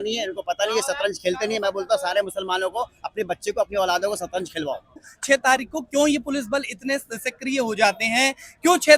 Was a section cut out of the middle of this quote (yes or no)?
yes